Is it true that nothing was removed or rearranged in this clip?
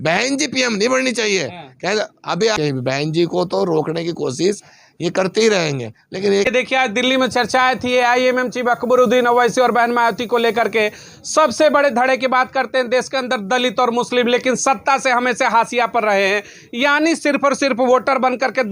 no; 2 cuts; at 2.6 s, 6.4 s

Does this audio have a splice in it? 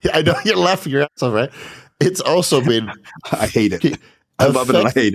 no; 0 cuts

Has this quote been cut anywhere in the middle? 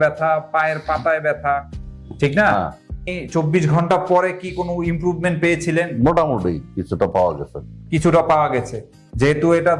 yes; 1 cut; at 3.0 s

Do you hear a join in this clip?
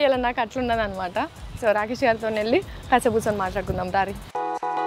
no; 0 cuts

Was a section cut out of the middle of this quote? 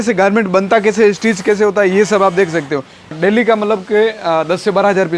yes; 1 cut; at 3.1 s

